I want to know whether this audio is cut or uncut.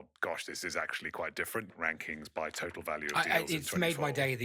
cut